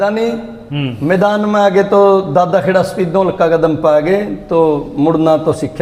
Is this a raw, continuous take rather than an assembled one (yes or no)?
yes